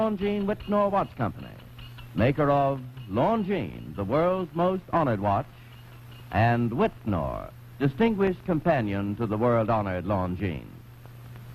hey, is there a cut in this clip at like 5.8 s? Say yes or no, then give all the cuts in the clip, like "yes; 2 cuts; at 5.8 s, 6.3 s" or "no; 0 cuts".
no; 1 cut; at 7.6 s